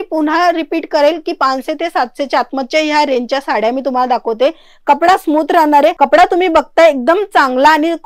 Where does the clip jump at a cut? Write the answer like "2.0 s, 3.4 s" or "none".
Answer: none